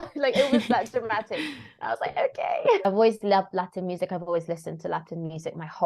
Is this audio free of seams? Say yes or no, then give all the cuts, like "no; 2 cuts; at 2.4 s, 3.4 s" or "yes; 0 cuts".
no; 1 cut; at 2.9 s